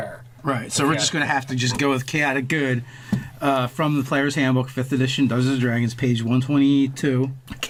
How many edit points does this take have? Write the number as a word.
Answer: zero